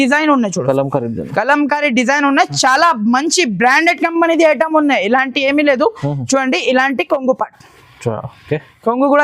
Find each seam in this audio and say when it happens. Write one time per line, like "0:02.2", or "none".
none